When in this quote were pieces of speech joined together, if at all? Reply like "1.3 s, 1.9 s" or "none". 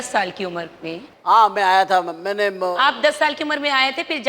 1.1 s